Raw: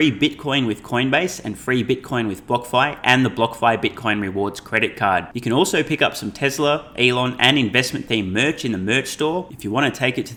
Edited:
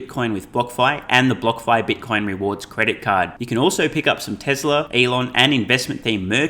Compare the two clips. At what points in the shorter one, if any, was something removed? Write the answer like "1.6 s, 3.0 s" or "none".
4.9 s